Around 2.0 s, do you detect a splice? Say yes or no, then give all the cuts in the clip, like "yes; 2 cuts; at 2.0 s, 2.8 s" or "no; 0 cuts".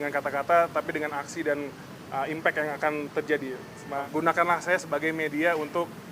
no; 1 cut; at 4.0 s